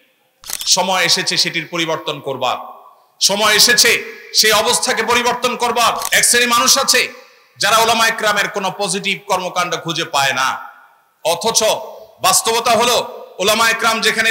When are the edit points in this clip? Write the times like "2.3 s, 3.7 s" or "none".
6.1 s